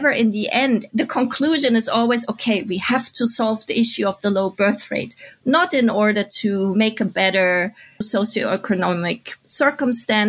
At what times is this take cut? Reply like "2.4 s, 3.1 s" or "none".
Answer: none